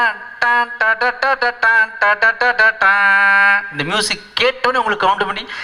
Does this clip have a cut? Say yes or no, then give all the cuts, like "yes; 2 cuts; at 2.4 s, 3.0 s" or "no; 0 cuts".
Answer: no; 0 cuts